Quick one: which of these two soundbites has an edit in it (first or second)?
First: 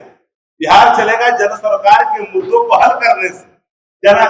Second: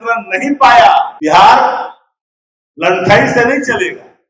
second